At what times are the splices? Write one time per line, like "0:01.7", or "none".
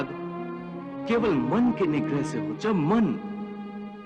0:02.6